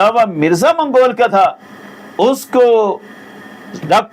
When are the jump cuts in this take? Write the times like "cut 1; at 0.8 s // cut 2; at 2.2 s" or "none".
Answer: none